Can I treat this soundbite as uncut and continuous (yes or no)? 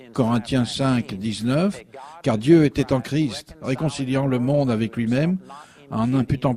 no